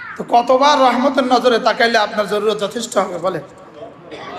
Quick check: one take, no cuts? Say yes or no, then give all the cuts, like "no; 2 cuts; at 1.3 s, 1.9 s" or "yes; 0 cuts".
yes; 0 cuts